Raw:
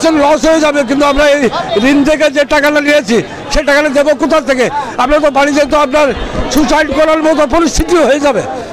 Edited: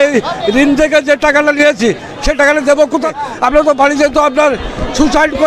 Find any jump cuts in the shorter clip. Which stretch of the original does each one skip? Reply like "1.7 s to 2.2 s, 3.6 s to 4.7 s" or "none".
4.4 s to 4.7 s